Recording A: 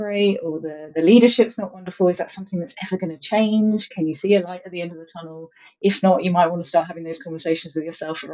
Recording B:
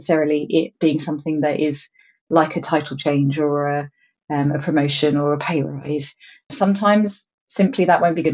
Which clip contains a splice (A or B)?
B